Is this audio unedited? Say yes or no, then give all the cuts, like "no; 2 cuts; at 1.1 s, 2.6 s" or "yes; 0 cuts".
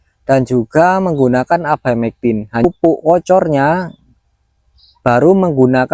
no; 1 cut; at 2.6 s